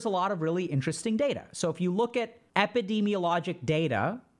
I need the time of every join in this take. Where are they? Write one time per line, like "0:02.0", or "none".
0:02.4